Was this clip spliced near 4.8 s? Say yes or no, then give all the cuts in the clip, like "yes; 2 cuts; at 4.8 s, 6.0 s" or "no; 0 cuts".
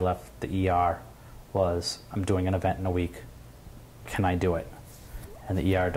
no; 0 cuts